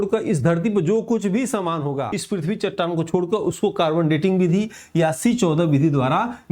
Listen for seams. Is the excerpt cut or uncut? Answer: cut